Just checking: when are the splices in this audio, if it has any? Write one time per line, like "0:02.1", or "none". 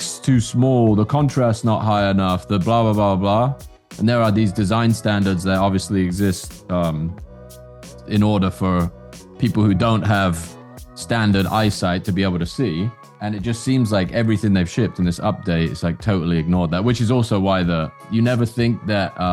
0:13.1
0:18.0